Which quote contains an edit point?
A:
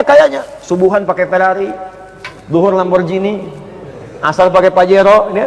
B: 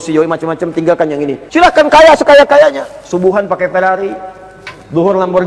B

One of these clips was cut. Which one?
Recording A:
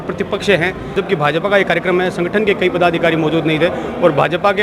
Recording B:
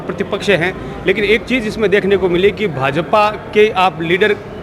A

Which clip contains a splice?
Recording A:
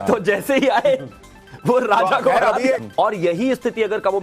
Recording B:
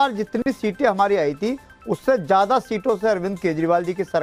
A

